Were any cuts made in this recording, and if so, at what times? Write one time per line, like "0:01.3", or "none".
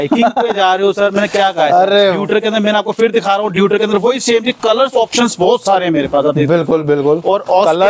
0:02.2